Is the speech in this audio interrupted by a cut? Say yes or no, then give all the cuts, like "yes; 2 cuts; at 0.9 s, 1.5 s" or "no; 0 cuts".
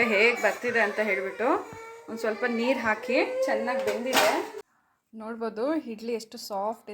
yes; 1 cut; at 4.7 s